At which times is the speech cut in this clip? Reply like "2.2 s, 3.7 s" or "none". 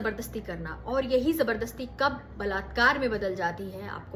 none